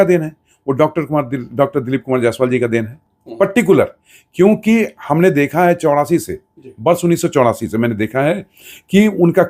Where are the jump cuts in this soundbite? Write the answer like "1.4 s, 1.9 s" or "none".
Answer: none